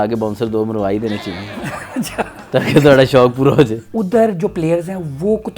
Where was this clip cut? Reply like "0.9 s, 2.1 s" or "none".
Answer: 3.9 s